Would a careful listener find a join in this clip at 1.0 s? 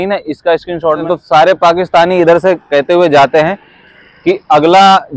yes; 1 cut; at 1.0 s

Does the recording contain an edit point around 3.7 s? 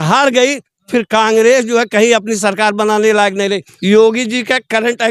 yes; 1 cut; at 3.7 s

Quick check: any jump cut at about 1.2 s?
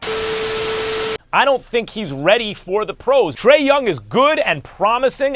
yes; 1 cut; at 1.2 s

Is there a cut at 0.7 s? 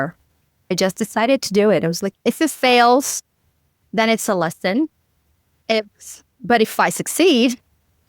yes; 2 cuts; at 0.7 s, 2.0 s

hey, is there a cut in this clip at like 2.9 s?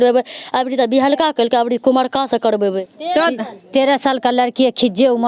yes; 1 cut; at 2.9 s

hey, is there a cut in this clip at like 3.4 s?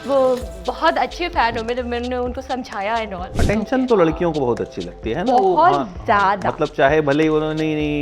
yes; 1 cut; at 3.4 s

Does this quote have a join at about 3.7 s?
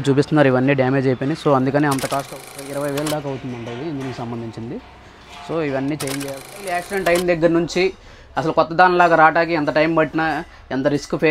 no; 2 cuts; at 2.3 s, 6.8 s

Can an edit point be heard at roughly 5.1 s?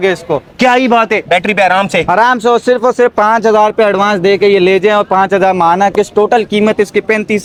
no; 0 cuts

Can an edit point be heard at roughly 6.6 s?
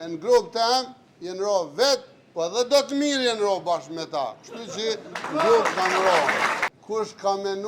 yes; 1 cut; at 6.6 s

